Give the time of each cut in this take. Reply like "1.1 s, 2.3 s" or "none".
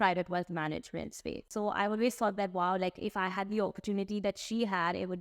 1.5 s

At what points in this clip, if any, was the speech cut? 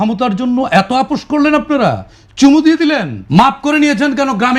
3.1 s

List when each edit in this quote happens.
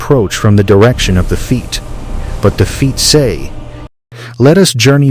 3.8 s

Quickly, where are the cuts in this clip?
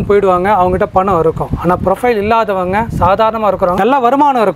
none

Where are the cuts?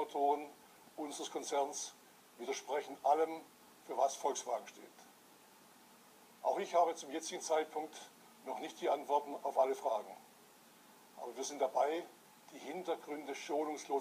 none

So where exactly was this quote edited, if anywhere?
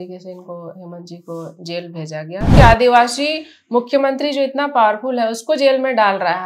2.5 s

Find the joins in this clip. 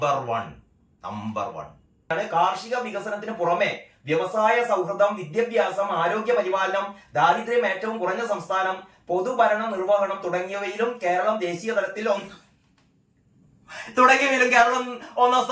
2.1 s

